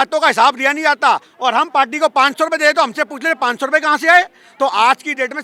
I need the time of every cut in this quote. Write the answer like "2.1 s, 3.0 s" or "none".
none